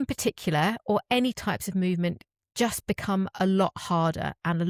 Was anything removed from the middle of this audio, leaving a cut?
no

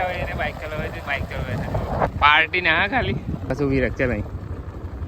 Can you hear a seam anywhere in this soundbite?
yes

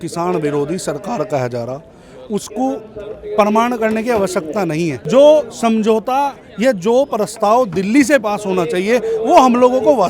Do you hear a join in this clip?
yes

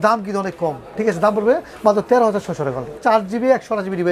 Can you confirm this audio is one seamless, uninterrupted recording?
no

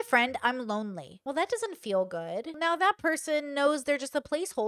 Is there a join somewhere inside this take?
yes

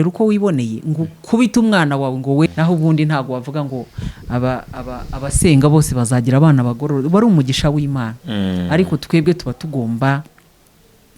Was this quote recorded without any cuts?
no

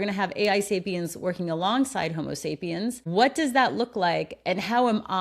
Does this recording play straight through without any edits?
no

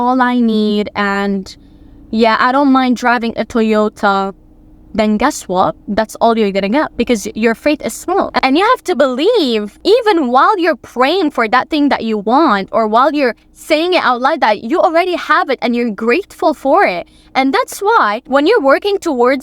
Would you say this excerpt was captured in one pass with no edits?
no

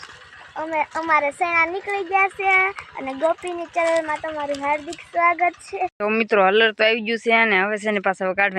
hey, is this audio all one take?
no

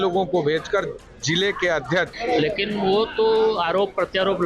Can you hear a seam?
yes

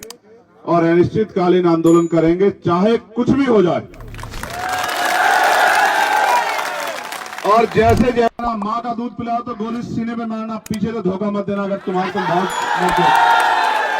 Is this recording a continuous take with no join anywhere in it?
no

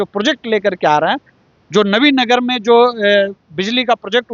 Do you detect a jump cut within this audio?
no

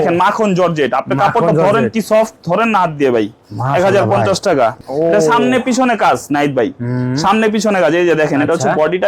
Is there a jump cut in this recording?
yes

